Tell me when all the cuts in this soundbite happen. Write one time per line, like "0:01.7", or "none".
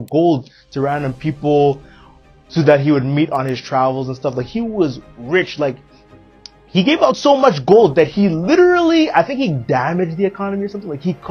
none